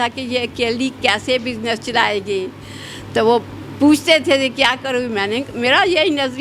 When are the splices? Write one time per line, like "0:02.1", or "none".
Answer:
none